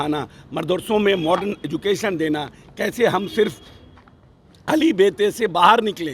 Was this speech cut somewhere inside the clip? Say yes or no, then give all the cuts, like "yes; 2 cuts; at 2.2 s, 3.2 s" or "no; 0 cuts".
no; 0 cuts